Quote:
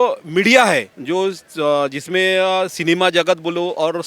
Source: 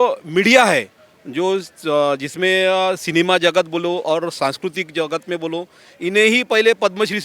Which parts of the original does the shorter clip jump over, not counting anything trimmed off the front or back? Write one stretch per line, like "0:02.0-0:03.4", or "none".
0:00.9-0:01.2